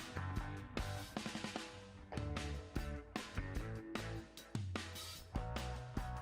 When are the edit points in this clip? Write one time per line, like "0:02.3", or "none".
none